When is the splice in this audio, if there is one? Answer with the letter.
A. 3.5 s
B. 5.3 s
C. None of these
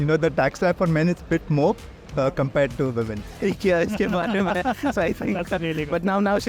A